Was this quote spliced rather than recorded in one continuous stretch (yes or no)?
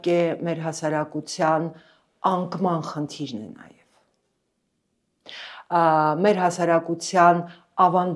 no